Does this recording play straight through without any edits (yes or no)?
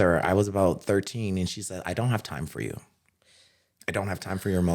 yes